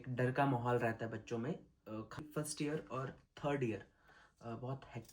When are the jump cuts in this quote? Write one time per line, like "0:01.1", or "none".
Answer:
0:02.2